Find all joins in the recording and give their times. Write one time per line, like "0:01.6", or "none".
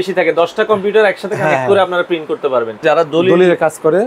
0:02.8